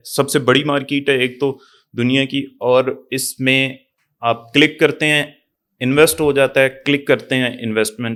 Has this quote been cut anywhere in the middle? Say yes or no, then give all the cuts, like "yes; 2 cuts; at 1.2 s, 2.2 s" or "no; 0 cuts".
no; 0 cuts